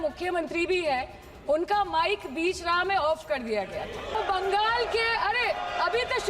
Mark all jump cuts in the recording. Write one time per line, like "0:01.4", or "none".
0:04.2